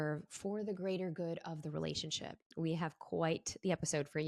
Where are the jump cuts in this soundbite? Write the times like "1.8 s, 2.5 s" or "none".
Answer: 2.5 s

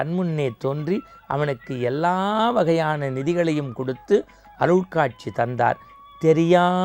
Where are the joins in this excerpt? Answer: none

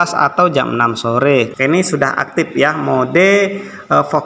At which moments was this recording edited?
1.5 s

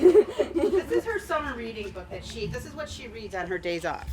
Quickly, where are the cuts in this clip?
none

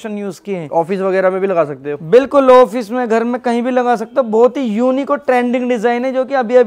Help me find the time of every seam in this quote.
none

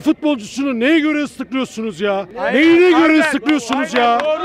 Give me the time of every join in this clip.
2.3 s

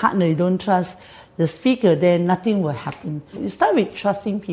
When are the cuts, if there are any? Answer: 3.4 s

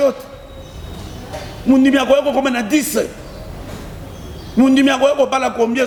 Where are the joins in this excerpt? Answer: none

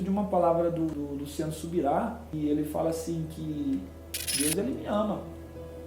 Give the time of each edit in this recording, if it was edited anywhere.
0.9 s, 2.3 s

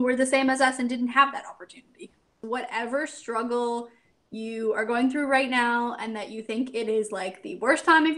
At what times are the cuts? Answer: 2.4 s

